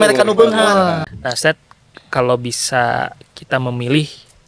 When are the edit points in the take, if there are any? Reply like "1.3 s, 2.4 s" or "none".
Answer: 1.1 s